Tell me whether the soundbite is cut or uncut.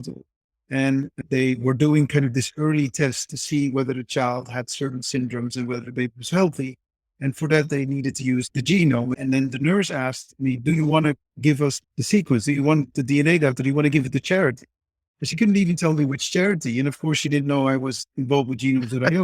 cut